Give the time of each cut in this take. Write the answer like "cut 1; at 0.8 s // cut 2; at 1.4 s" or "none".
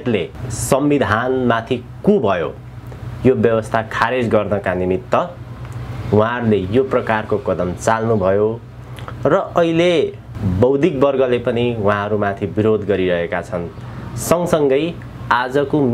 none